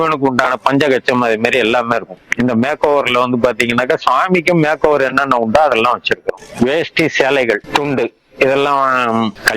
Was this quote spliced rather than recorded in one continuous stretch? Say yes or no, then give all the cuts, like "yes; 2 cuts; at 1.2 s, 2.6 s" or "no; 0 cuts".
yes; 1 cut; at 6.4 s